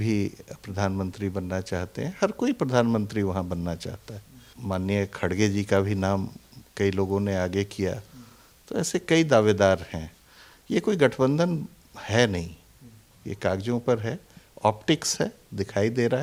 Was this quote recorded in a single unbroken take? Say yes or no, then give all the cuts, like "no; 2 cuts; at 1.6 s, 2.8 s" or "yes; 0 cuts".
yes; 0 cuts